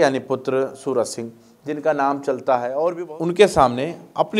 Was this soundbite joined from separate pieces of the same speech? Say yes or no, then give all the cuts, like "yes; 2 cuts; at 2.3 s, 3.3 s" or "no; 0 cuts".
yes; 1 cut; at 3.1 s